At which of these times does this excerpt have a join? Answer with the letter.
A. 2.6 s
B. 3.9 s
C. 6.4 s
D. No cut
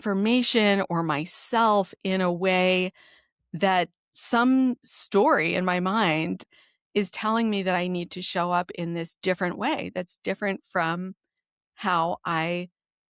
C